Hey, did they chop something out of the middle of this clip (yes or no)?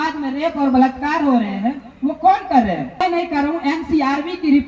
yes